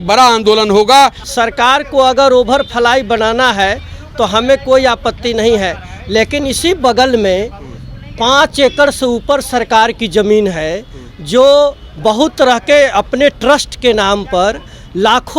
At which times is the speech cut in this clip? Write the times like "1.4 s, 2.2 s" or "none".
1.2 s